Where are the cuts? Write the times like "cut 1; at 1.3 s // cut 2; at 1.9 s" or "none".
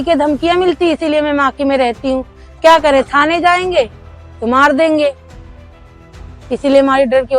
none

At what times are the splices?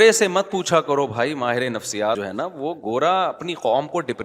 cut 1; at 2.2 s

